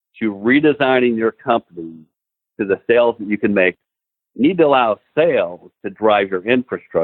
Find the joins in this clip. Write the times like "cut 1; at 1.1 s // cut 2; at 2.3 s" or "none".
cut 1; at 3.7 s

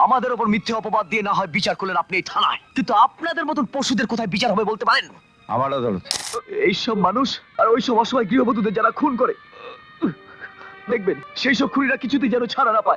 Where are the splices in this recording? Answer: cut 1; at 2.6 s // cut 2; at 6.2 s // cut 3; at 7.4 s // cut 4; at 11.3 s

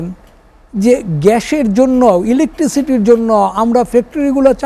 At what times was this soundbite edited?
none

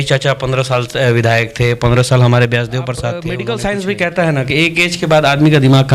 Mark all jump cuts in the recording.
cut 1; at 3.3 s

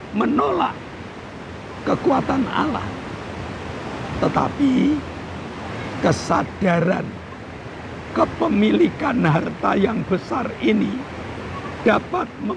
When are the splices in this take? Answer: none

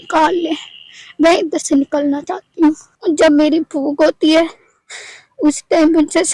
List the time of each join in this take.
cut 1; at 2.9 s

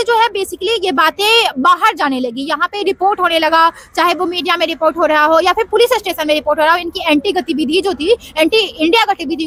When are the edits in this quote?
none

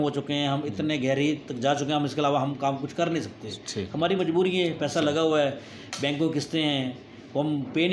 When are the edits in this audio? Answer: none

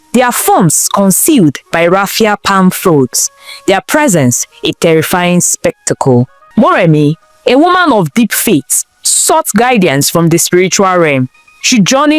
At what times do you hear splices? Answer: cut 1; at 6.4 s

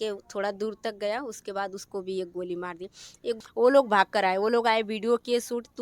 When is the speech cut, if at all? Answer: cut 1; at 3.4 s

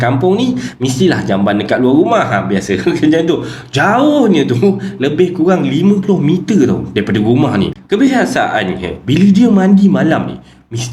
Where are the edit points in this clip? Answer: cut 1; at 7.8 s

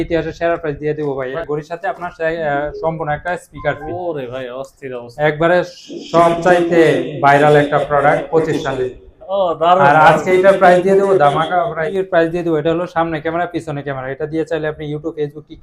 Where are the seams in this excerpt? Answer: cut 1; at 1.3 s // cut 2; at 11.8 s

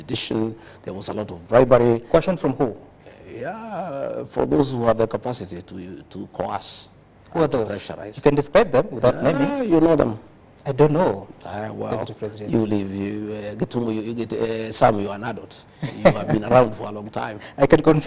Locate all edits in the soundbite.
none

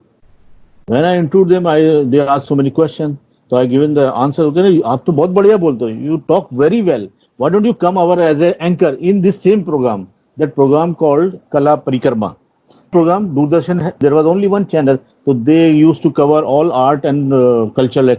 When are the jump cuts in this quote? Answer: cut 1; at 12.9 s // cut 2; at 14.0 s

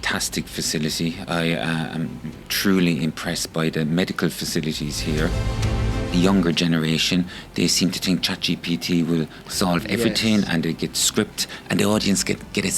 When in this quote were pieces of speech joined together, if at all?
cut 1; at 5.5 s

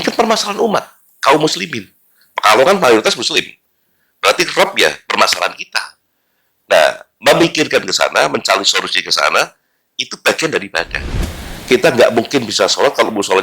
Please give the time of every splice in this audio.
cut 1; at 11.0 s

